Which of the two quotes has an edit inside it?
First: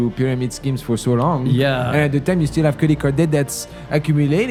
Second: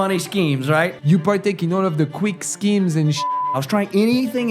second; 2 cuts; at 1.0 s, 3.4 s

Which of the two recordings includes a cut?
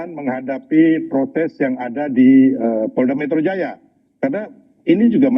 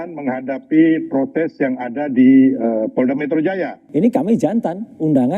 second; 1 cut; at 3.8 s

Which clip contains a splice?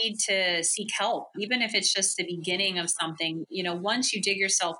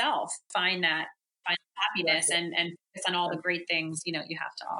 first; 1 cut; at 1.3 s

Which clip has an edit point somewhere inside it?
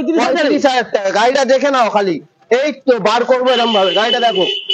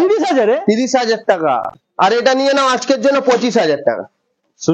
second; 1 cut; at 1.6 s

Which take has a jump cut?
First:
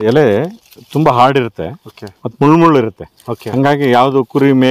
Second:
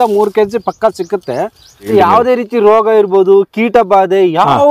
second; 1 cut; at 1.9 s

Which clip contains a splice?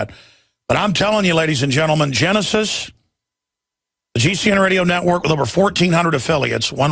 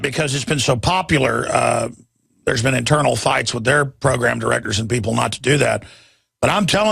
second; 1 cut; at 4.7 s

